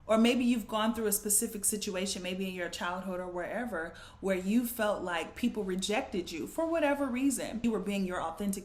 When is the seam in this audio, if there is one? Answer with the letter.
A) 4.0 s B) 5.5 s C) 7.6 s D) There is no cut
C